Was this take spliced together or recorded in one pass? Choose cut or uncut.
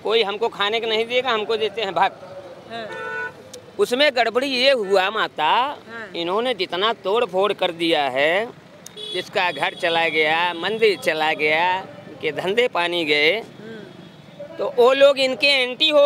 uncut